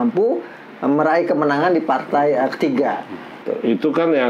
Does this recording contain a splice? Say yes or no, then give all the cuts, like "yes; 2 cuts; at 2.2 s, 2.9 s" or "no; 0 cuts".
yes; 1 cut; at 3.4 s